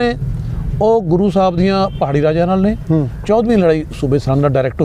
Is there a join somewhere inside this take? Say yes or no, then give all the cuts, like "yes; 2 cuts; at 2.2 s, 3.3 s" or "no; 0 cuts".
no; 0 cuts